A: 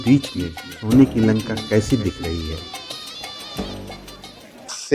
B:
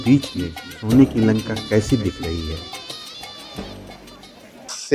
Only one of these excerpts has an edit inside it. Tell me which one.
A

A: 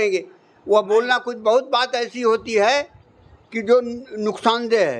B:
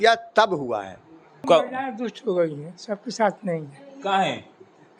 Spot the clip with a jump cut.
B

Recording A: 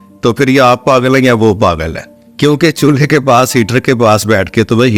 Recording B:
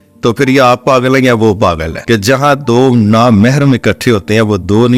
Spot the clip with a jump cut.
B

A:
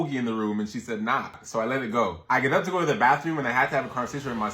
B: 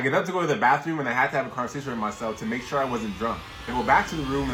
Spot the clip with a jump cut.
A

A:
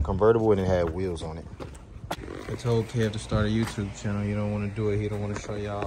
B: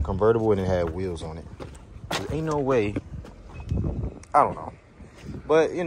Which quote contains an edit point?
A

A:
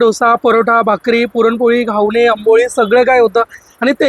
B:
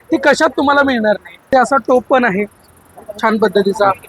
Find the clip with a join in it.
B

